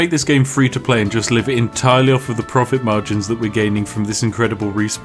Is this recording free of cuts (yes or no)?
yes